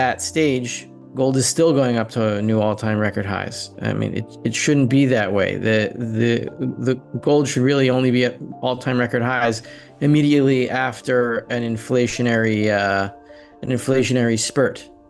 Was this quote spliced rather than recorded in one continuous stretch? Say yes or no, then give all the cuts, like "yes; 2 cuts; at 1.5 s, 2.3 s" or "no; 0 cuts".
no; 0 cuts